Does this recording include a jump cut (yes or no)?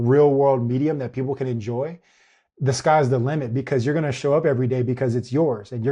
no